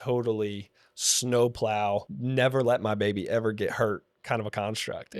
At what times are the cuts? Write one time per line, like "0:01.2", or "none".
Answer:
0:02.2
0:04.1